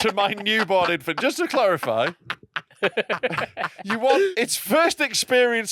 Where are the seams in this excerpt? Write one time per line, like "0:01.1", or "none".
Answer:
0:04.3